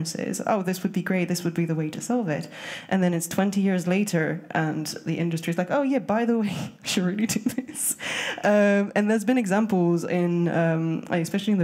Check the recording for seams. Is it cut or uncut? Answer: uncut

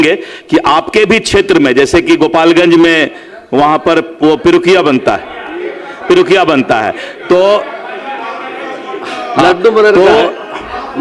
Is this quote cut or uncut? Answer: uncut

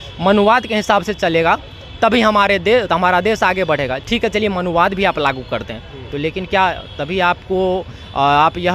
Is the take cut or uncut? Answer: uncut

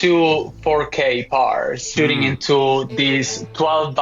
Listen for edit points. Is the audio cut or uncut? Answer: cut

